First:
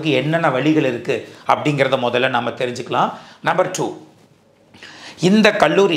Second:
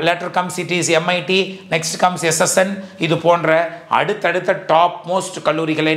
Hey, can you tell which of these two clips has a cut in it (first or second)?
first